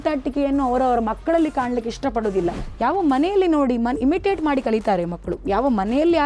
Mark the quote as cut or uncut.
cut